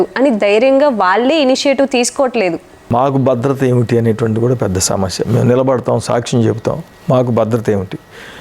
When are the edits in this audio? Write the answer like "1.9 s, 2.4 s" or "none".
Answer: 2.9 s